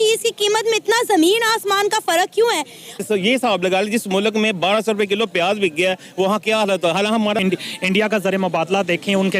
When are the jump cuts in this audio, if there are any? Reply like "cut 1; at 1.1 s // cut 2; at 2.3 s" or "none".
cut 1; at 3.0 s // cut 2; at 7.4 s